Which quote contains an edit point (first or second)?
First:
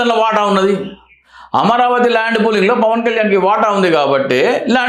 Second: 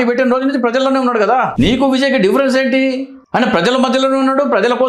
second